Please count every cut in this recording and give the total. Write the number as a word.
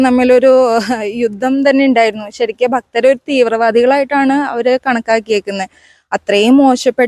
zero